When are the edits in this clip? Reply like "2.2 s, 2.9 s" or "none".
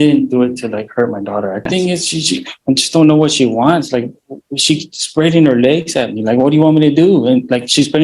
1.7 s